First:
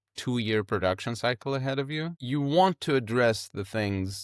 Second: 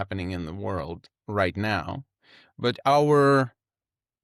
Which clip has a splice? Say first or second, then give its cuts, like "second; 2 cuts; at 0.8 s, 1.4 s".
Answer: first; 1 cut; at 2.2 s